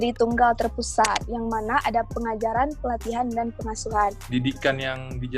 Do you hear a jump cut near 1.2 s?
yes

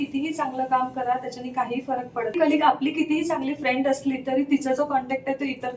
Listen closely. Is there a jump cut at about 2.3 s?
yes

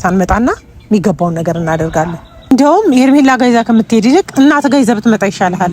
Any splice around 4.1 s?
no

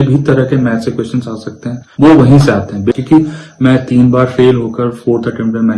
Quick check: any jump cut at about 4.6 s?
no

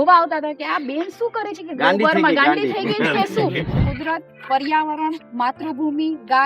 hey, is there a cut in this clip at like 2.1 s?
no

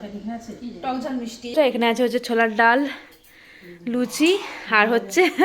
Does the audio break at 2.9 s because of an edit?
no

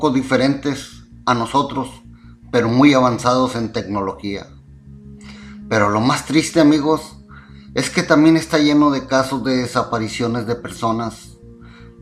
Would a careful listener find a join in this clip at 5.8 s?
yes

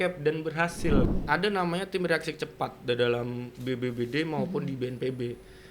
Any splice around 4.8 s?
no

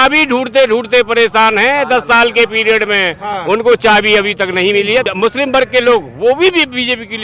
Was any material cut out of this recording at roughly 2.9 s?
no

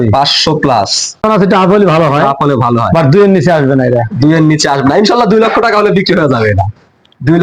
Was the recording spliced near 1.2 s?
yes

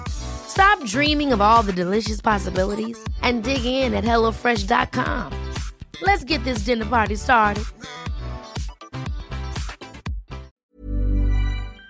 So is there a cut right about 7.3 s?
no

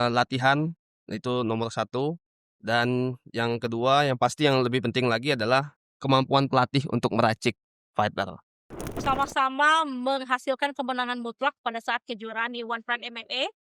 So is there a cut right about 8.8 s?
yes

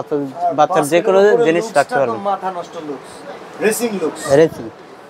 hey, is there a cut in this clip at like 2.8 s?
no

